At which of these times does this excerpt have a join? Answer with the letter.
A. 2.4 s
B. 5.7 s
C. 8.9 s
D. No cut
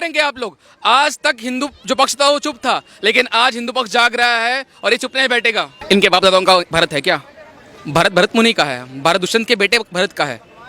B